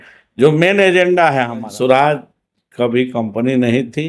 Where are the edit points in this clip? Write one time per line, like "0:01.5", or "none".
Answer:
0:01.7